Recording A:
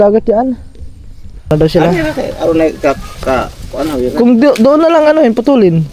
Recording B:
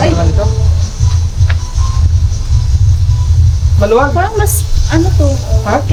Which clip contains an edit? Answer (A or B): A